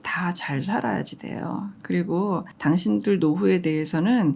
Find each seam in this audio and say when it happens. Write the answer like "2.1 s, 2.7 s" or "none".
2.5 s